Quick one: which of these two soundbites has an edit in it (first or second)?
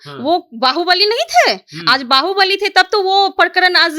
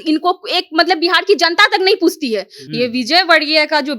second